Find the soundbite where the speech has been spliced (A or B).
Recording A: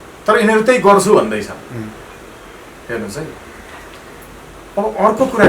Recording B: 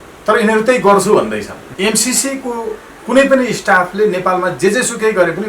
B